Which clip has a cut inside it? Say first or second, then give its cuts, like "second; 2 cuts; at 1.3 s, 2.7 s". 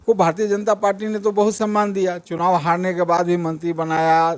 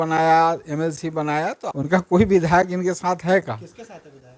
second; 1 cut; at 1.7 s